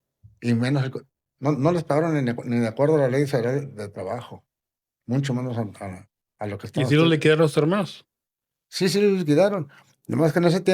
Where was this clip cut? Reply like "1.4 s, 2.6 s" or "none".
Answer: none